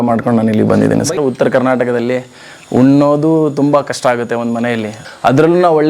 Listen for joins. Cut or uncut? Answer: cut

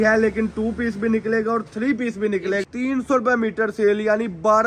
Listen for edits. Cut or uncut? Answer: cut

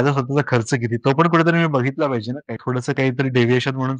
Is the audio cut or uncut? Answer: cut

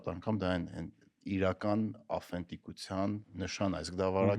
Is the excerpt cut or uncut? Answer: cut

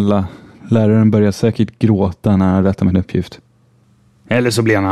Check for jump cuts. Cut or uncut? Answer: cut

